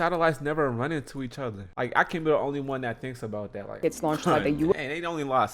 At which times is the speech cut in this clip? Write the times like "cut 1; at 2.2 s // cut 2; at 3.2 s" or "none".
cut 1; at 1.6 s // cut 2; at 3.8 s